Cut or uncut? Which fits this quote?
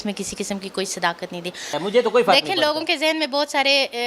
cut